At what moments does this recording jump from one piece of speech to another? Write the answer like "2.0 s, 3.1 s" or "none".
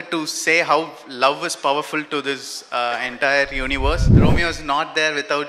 4.1 s